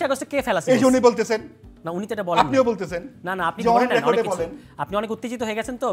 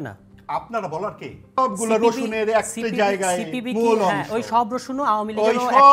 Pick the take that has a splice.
second; 1 cut; at 1.6 s

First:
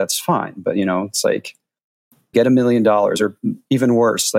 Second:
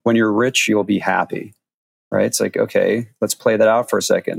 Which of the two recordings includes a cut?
first; 1 cut; at 2.3 s

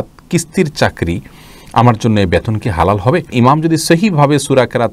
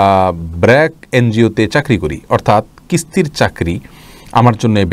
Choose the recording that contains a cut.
first; 1 cut; at 3.3 s

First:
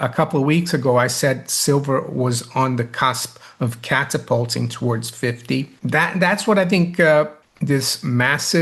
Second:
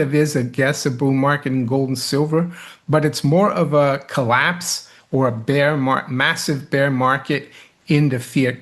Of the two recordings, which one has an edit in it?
first; 2 cuts; at 5.7 s, 7.4 s

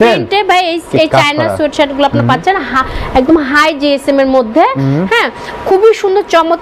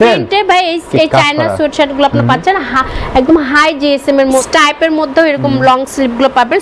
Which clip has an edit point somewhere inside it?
second; 1 cut; at 4.5 s

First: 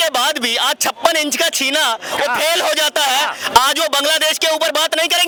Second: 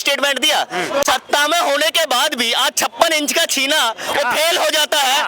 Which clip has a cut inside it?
second; 1 cut; at 1.1 s

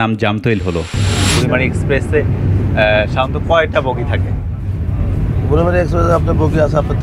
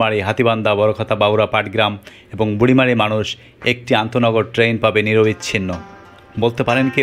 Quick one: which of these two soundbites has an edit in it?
first; 1 cut; at 0.9 s

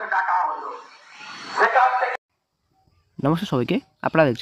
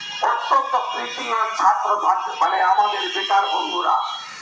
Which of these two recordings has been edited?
first; 1 cut; at 2.1 s

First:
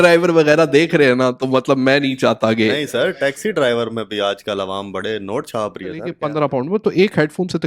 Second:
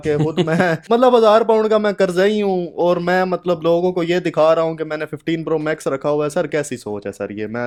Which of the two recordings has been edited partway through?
first; 1 cut; at 6.2 s

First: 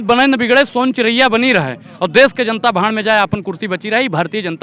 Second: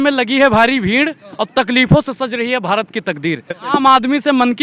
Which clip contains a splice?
second; 1 cut; at 3.6 s

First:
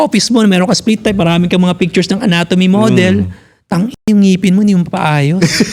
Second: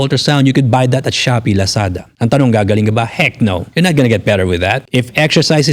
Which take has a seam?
second; 3 cuts; at 2.0 s, 3.6 s, 4.8 s

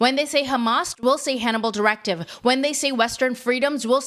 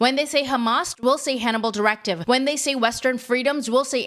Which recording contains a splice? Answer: second; 1 cut; at 2.2 s

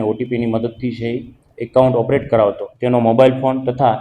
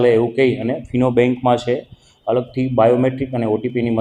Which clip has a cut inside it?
first; 1 cut; at 2.7 s

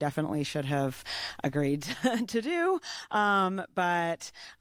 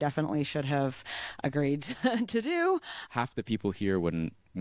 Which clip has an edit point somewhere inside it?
second; 1 cut; at 3.0 s

